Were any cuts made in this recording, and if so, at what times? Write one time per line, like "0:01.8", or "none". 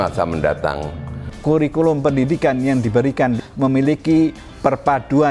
0:01.3
0:03.4